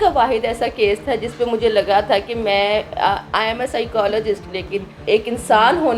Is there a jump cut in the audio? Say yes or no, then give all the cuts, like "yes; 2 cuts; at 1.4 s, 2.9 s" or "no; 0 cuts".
yes; 1 cut; at 5.0 s